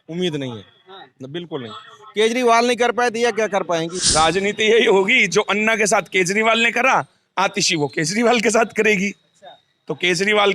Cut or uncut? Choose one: cut